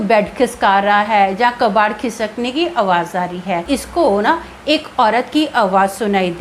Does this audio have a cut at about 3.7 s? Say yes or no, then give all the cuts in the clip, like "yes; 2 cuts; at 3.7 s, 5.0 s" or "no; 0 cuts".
yes; 1 cut; at 3.7 s